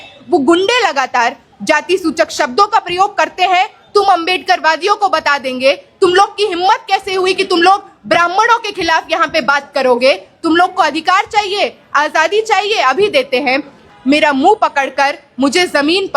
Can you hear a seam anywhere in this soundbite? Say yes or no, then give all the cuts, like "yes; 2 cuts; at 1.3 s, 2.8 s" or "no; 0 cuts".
yes; 1 cut; at 13.8 s